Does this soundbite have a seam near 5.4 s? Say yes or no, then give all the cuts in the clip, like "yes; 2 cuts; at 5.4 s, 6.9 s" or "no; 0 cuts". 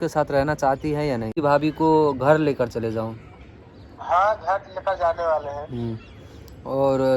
no; 1 cut; at 1.4 s